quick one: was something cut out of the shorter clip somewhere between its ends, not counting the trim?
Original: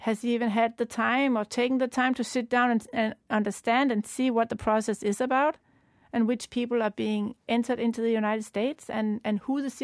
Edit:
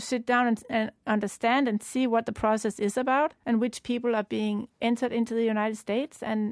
yes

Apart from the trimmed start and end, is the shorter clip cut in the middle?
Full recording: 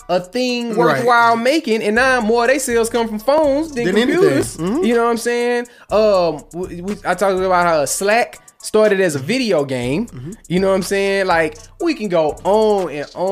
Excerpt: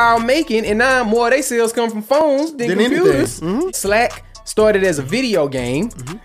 yes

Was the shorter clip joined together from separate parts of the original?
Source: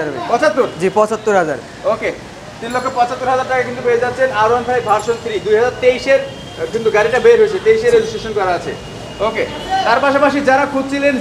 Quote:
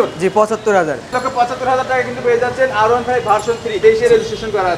yes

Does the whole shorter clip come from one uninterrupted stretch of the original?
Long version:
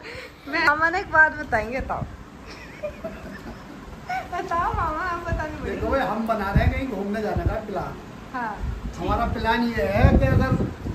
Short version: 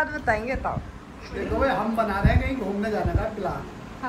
no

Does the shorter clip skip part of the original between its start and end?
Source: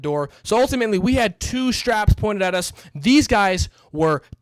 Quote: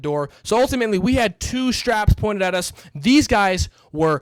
no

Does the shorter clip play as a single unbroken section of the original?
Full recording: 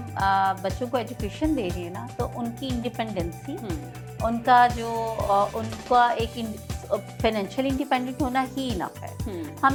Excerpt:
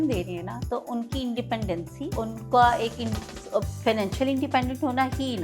no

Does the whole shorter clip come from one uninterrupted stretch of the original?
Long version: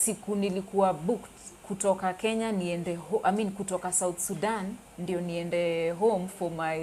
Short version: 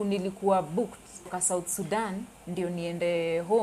no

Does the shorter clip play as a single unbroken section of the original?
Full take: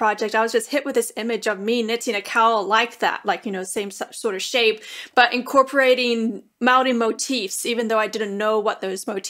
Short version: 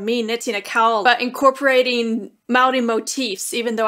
no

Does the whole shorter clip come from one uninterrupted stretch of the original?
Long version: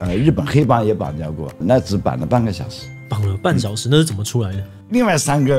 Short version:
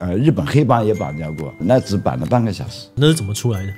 no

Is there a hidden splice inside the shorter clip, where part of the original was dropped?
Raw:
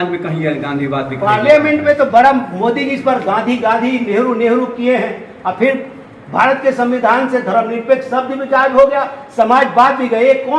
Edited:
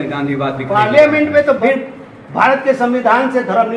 yes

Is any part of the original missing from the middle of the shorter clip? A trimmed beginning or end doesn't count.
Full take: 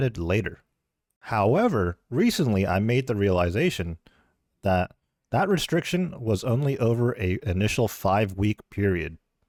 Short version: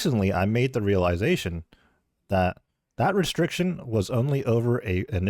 no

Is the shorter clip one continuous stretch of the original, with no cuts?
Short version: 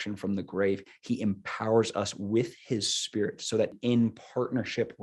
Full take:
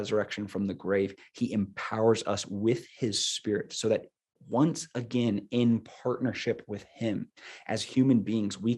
no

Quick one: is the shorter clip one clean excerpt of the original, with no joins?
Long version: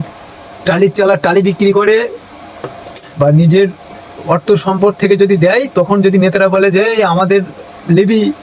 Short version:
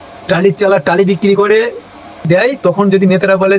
no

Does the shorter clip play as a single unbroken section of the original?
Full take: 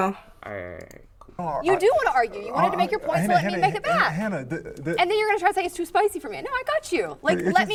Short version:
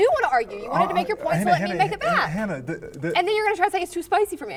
yes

